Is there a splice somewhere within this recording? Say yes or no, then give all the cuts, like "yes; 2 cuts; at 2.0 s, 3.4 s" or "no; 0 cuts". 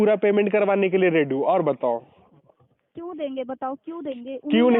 no; 0 cuts